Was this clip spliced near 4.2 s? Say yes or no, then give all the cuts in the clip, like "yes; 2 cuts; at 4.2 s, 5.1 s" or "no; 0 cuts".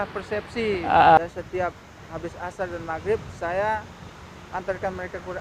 no; 1 cut; at 1.2 s